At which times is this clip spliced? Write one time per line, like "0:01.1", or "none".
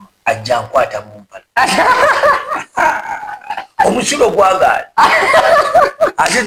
none

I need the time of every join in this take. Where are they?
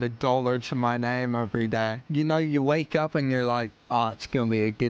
0:02.0
0:03.8

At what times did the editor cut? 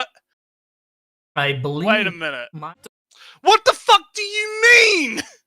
0:02.7

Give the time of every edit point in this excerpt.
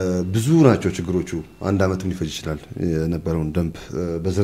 none

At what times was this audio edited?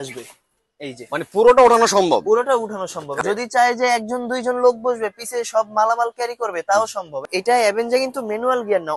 0:03.2
0:07.2

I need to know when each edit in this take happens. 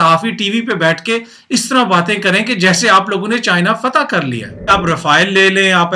0:04.7

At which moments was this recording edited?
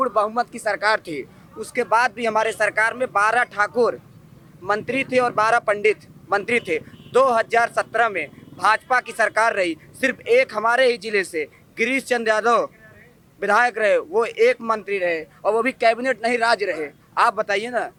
none

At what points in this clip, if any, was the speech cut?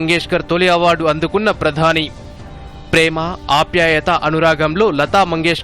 none

